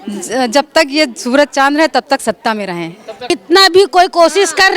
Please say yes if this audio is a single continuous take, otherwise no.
no